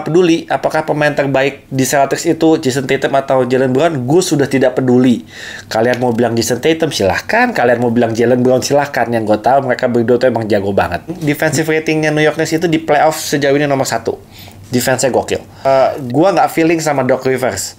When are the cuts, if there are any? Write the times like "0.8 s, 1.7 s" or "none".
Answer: 11.2 s, 15.7 s